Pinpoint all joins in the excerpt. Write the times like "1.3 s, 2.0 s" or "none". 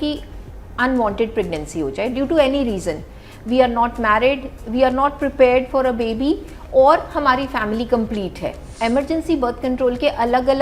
8.6 s